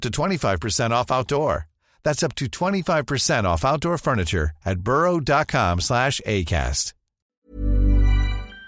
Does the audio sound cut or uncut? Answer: cut